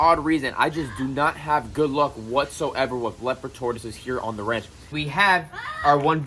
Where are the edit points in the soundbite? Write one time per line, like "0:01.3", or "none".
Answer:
0:04.9